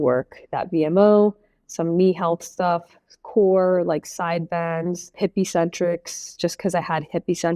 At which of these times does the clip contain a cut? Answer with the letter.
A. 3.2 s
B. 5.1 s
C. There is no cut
B